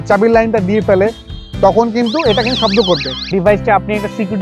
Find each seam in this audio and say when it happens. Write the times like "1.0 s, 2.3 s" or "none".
3.0 s

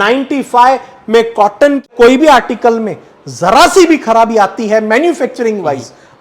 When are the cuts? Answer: 1.9 s

